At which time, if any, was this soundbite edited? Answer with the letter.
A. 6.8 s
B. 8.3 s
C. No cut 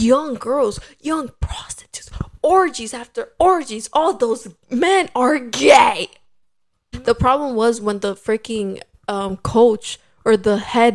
A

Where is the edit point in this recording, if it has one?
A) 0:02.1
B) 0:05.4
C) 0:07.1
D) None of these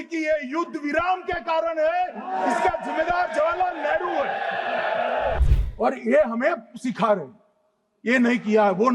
B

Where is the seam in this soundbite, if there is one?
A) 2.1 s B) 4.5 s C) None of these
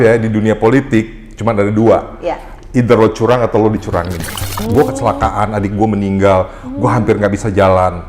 B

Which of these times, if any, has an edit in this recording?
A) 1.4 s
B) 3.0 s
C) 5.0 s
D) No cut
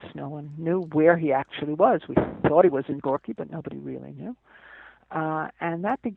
D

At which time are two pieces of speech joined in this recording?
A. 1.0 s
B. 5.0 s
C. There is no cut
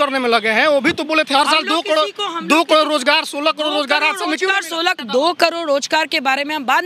B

